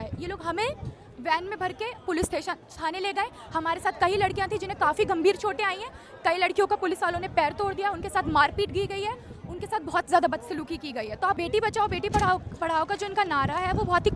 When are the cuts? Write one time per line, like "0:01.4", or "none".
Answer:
0:11.4